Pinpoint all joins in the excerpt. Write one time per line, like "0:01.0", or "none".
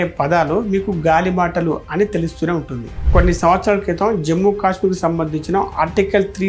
0:03.0